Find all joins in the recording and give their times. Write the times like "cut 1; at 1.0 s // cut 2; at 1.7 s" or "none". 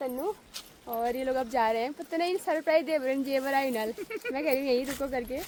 none